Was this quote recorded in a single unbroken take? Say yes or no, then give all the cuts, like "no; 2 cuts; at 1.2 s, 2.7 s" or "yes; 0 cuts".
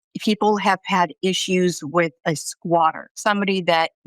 no; 1 cut; at 3.1 s